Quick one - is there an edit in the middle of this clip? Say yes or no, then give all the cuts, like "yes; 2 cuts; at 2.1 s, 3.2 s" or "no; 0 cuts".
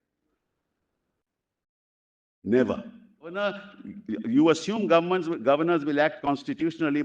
yes; 1 cut; at 3.4 s